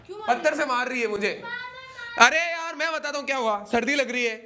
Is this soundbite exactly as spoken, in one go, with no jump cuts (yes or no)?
yes